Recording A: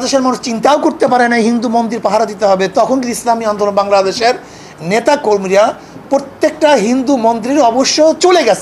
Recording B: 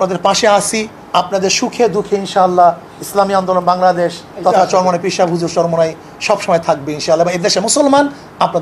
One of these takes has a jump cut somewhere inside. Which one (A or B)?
B